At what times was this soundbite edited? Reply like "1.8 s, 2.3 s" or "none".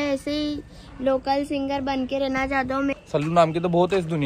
2.9 s